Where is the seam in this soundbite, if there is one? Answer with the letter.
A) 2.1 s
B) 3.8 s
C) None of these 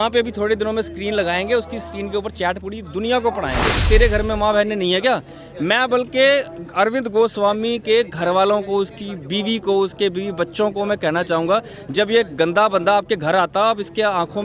B